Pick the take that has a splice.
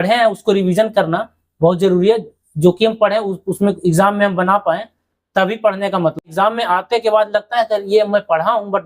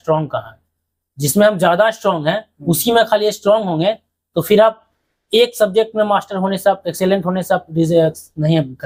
first; 1 cut; at 6.2 s

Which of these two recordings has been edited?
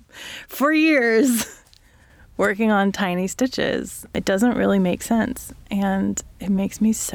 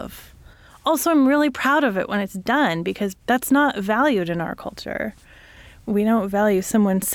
second; 2 cuts; at 3.2 s, 5.8 s

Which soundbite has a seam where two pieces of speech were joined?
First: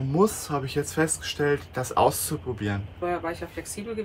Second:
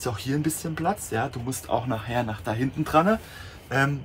first; 1 cut; at 2.9 s

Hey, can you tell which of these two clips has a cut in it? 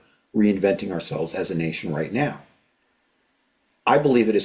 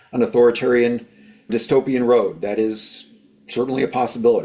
second; 1 cut; at 1.5 s

